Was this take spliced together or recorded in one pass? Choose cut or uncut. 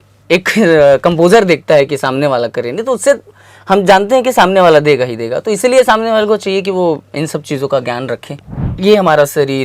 cut